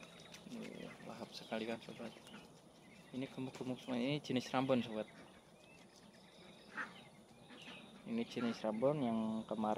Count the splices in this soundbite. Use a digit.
0